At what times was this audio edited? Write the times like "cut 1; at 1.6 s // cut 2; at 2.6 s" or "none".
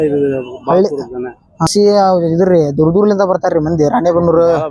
cut 1; at 1.7 s